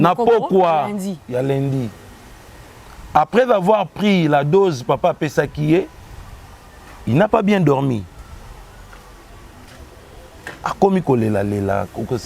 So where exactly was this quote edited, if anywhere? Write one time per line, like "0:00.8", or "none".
none